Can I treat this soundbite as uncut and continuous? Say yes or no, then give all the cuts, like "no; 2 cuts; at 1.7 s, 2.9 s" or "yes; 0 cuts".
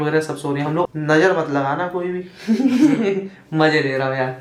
yes; 0 cuts